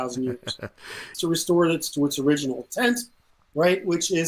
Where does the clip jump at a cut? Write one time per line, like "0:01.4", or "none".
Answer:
0:01.1